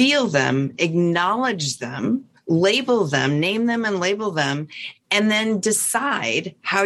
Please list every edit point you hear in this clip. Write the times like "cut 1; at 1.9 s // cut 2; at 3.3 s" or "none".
none